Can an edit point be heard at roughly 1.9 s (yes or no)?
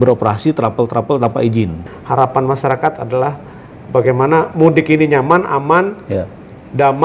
yes